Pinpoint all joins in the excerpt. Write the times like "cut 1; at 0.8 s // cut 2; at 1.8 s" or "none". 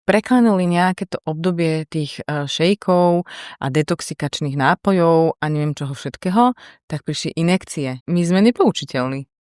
cut 1; at 8.0 s